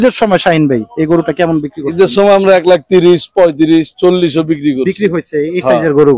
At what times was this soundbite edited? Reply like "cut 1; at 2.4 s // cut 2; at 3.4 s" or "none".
none